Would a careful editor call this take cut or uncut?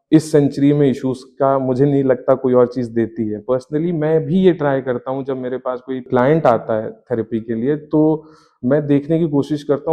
uncut